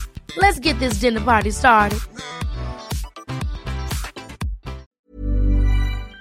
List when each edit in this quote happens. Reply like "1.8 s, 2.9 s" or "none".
4.9 s